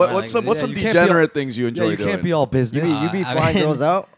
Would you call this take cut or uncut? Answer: uncut